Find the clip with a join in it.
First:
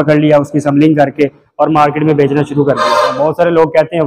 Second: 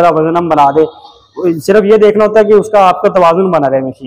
first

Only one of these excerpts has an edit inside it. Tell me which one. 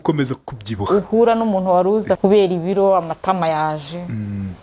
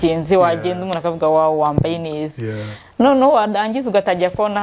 first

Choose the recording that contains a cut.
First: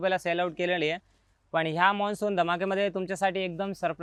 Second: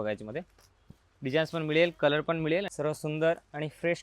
second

